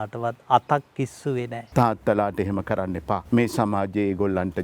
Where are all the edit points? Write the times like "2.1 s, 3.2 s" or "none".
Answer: 1.6 s, 3.2 s